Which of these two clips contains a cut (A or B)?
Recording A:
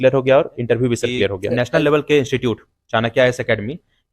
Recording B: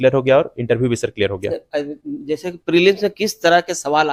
A